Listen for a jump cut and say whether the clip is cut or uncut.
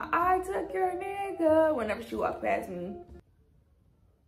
uncut